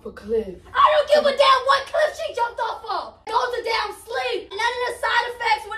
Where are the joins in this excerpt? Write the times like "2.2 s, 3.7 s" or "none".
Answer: 3.3 s, 4.6 s